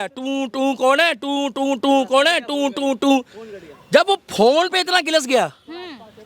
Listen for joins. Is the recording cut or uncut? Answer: uncut